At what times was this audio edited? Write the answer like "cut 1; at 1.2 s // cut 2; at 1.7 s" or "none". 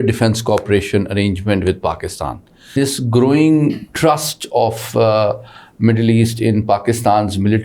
cut 1; at 2.7 s

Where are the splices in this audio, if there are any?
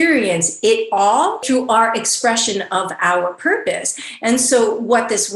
cut 1; at 1.4 s

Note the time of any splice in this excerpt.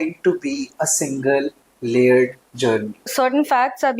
cut 1; at 3.1 s

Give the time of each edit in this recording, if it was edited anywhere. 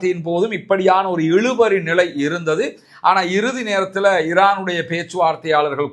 none

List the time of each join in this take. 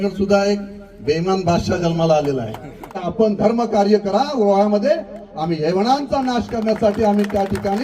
cut 1; at 3.1 s

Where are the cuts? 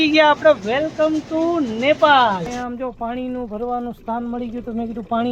cut 1; at 2.6 s

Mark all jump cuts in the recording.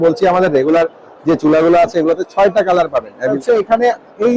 cut 1; at 3.2 s

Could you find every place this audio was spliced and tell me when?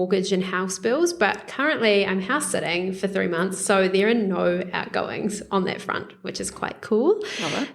none

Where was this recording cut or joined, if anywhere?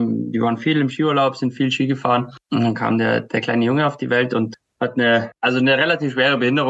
none

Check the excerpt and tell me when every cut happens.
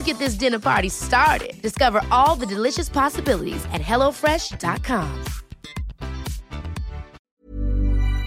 cut 1; at 7.2 s

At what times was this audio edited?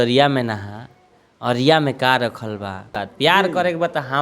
cut 1; at 3.0 s

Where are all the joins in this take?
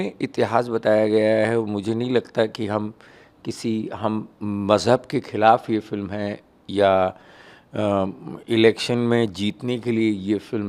none

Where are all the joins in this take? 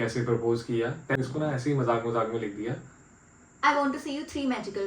cut 1; at 1.2 s

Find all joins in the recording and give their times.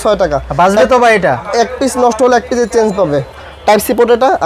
cut 1; at 3.3 s

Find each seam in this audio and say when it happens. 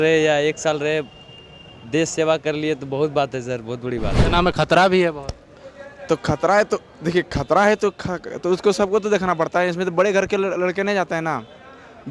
cut 1; at 4.2 s

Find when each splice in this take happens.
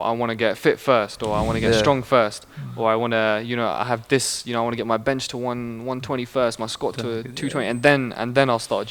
none

